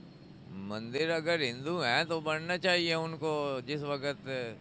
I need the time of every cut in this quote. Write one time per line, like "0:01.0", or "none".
none